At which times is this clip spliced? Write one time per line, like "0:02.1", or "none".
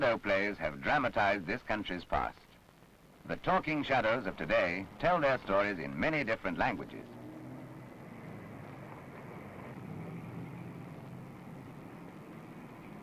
0:06.9